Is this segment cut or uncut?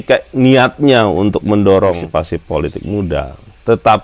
cut